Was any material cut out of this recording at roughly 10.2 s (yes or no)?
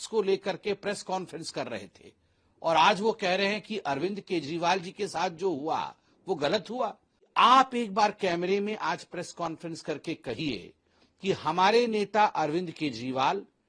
no